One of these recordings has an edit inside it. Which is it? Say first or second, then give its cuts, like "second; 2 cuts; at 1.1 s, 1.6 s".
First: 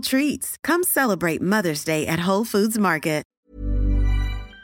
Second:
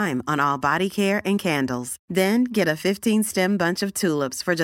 first; 1 cut; at 3.3 s